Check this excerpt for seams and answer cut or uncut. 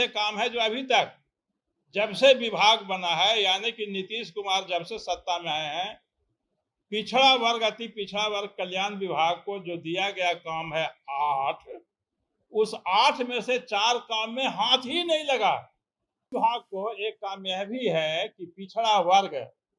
cut